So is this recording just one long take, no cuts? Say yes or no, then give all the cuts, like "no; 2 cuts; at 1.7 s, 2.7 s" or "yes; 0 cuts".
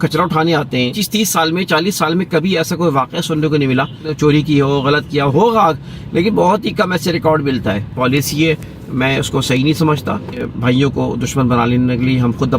no; 4 cuts; at 1.0 s, 4.1 s, 7.9 s, 10.4 s